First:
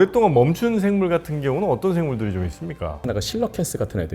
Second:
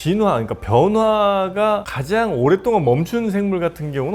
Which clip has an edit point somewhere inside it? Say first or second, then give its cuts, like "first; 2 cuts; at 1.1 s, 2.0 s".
first; 1 cut; at 3.0 s